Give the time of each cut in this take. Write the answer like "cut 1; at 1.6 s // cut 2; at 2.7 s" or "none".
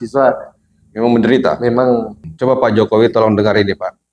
cut 1; at 2.2 s